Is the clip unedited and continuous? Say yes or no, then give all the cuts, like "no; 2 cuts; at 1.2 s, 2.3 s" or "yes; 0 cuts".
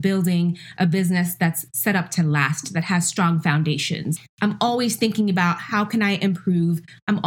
no; 2 cuts; at 1.7 s, 4.1 s